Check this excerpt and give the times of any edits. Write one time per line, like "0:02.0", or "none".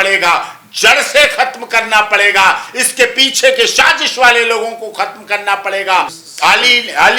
0:06.2